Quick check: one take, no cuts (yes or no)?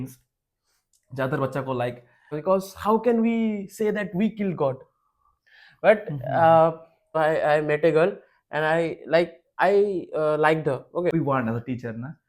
no